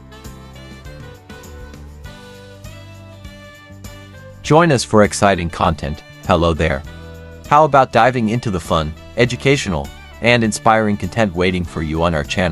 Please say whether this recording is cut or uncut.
cut